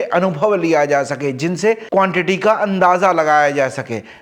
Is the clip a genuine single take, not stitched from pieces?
yes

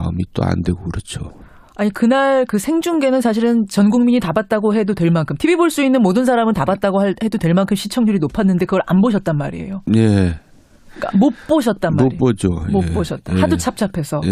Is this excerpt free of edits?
yes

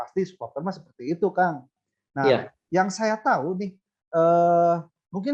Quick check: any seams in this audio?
no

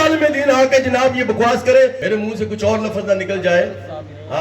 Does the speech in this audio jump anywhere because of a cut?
yes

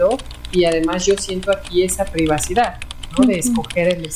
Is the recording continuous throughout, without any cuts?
yes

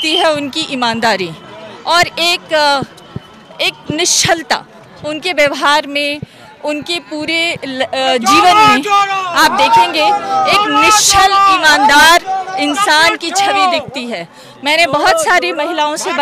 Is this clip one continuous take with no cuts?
yes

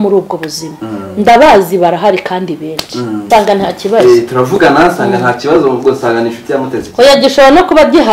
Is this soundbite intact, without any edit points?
no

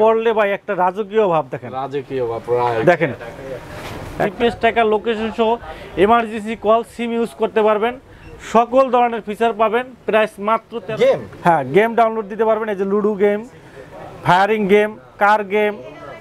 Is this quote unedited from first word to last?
no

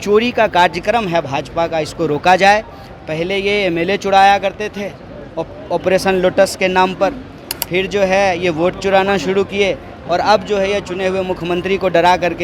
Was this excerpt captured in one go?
yes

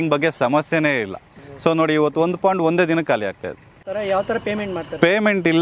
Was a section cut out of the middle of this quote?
no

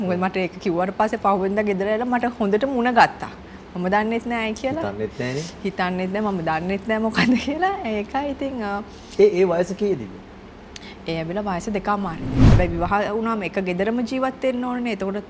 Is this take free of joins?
no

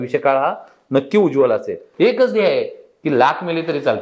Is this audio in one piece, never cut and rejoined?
no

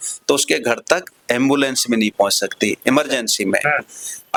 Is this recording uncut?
yes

